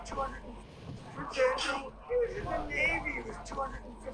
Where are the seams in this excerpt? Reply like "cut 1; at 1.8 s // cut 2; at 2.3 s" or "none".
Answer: cut 1; at 1.0 s // cut 2; at 1.9 s

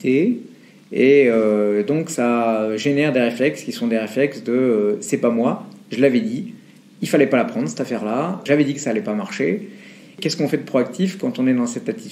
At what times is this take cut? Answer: none

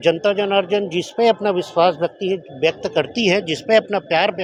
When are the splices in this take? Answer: none

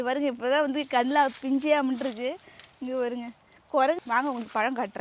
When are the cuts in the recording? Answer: cut 1; at 4.0 s

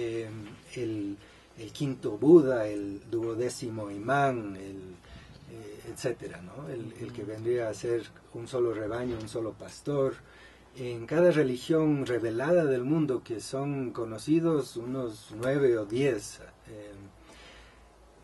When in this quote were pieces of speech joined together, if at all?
none

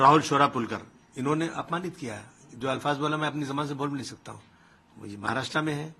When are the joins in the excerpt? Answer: none

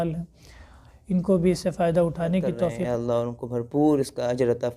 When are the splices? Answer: cut 1; at 2.8 s

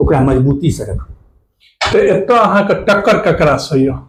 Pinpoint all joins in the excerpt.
none

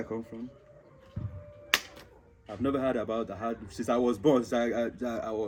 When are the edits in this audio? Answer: none

